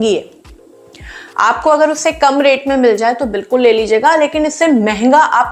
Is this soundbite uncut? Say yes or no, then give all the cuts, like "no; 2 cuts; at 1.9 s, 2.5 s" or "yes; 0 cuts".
yes; 0 cuts